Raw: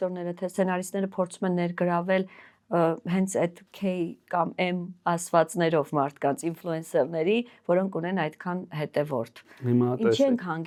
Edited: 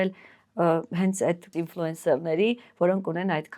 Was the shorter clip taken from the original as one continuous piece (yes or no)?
no